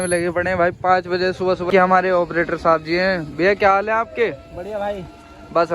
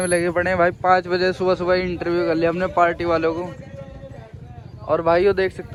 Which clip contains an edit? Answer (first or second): first